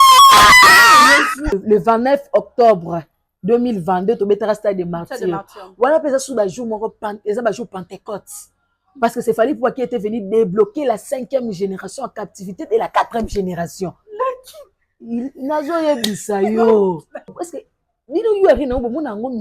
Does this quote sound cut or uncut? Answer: cut